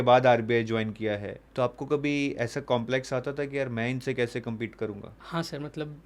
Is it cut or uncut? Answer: cut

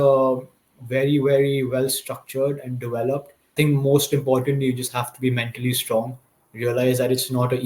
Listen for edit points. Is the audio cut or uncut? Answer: cut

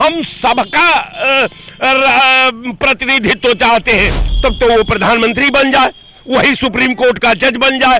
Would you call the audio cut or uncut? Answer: cut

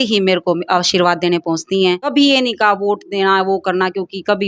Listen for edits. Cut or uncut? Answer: cut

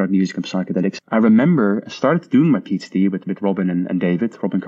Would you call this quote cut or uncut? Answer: cut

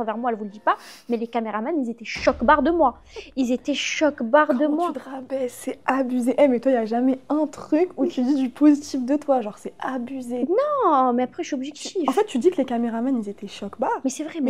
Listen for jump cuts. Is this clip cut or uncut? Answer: uncut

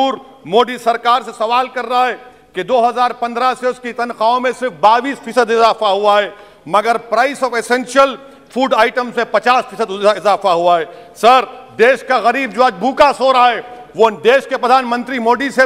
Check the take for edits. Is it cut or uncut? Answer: uncut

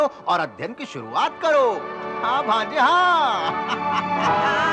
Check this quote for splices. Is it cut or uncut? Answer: uncut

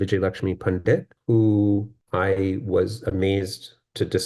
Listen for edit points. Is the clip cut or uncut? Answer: cut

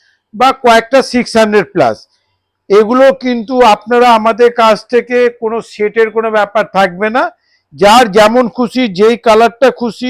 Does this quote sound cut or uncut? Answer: uncut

